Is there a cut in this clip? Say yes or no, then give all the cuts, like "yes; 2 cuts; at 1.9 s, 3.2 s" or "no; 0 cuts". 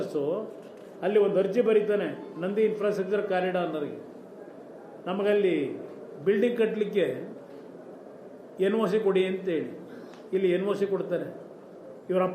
no; 0 cuts